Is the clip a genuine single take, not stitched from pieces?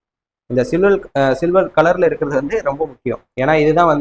yes; 0 cuts

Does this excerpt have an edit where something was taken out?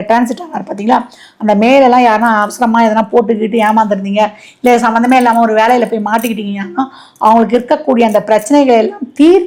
no; 0 cuts

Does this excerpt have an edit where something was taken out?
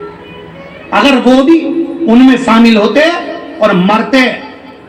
no; 0 cuts

